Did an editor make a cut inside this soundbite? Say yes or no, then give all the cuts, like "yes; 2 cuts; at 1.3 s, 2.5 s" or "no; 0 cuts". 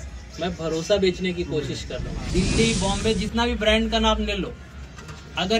yes; 1 cut; at 2.1 s